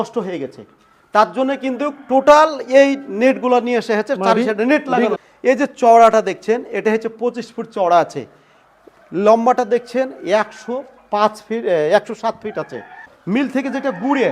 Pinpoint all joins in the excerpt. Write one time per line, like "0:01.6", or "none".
0:05.2
0:13.1